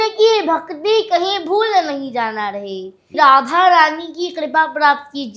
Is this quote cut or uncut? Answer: cut